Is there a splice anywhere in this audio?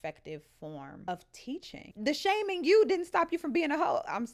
yes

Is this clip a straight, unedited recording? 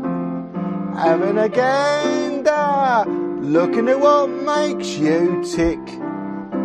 yes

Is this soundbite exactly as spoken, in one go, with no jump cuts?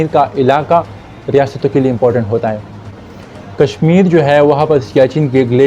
yes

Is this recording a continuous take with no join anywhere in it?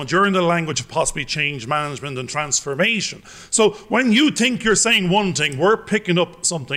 yes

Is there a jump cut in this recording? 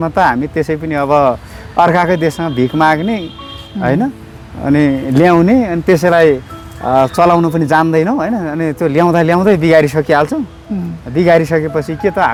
no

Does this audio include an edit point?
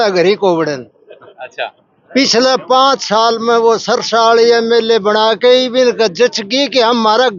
no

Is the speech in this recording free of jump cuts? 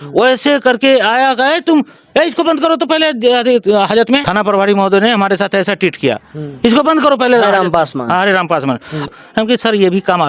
no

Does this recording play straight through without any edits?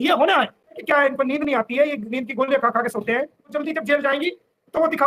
no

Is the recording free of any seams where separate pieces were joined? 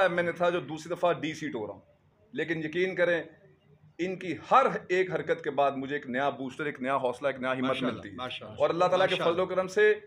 yes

